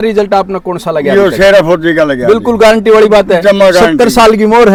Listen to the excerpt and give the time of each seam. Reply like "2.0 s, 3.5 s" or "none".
none